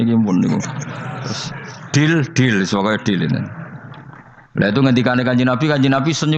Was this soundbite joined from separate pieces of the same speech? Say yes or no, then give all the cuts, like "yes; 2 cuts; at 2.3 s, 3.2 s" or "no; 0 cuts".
no; 0 cuts